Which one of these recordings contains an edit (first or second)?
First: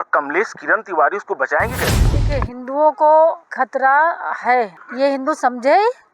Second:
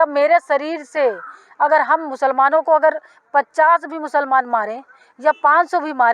first